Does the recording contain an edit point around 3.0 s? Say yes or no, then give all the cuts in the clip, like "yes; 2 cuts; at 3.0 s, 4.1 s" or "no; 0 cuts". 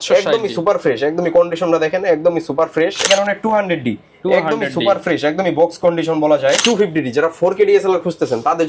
yes; 2 cuts; at 3.0 s, 6.6 s